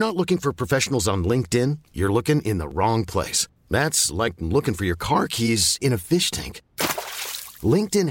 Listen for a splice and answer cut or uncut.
uncut